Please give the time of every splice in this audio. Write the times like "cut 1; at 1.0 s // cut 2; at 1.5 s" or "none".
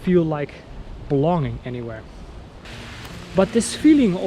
cut 1; at 2.6 s